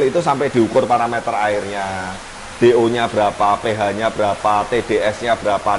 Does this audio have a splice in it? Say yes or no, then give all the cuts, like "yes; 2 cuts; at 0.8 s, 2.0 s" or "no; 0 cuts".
no; 0 cuts